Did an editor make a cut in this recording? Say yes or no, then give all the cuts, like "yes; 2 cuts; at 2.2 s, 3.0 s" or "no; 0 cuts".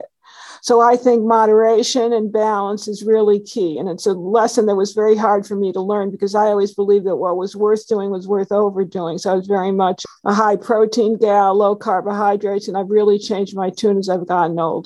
yes; 1 cut; at 10.0 s